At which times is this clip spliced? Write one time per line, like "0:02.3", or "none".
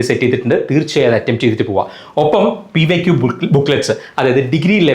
none